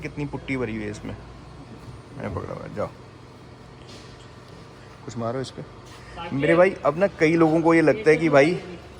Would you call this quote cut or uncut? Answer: uncut